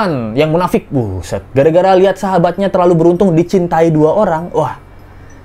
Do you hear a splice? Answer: no; 0 cuts

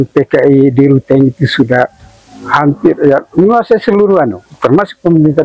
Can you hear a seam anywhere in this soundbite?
no; 0 cuts

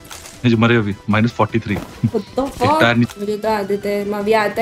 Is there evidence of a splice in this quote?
no; 0 cuts

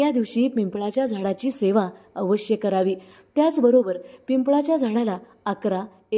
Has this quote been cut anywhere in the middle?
no; 0 cuts

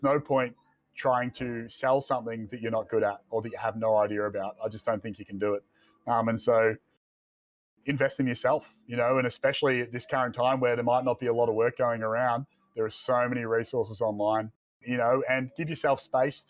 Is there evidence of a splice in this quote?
yes; 1 cut; at 14.8 s

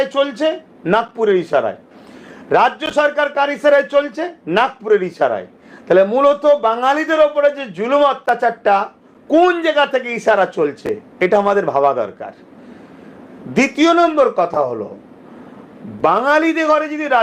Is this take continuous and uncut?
yes; 0 cuts

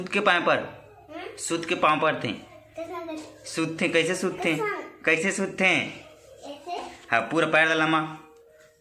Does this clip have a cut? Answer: no; 0 cuts

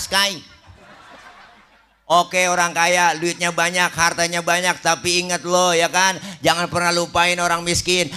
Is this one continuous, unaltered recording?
no; 1 cut; at 2.1 s

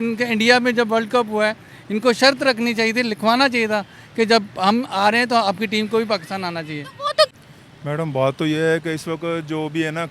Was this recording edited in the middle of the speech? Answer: yes; 1 cut; at 7.3 s

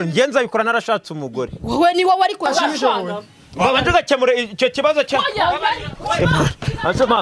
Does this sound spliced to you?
yes; 1 cut; at 2.5 s

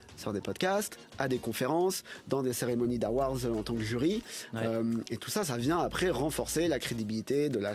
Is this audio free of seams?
yes; 0 cuts

